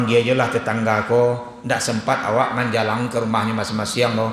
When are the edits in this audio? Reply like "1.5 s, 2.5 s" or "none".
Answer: none